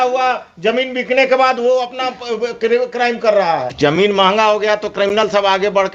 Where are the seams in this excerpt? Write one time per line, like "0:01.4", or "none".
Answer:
0:03.7